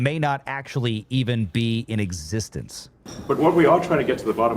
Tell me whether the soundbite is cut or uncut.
cut